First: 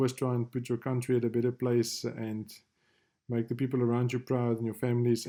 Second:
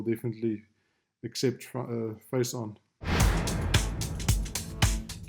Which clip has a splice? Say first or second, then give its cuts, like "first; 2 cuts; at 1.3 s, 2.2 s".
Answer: second; 1 cut; at 2.9 s